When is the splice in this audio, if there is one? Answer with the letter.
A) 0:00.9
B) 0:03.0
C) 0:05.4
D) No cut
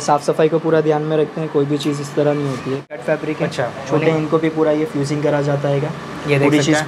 B